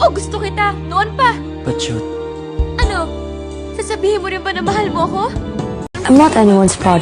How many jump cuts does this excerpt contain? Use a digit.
1